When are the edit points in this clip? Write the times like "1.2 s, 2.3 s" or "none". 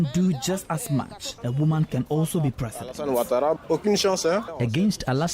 1.4 s, 3.6 s, 4.5 s